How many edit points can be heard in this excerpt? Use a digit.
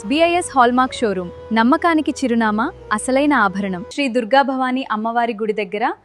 1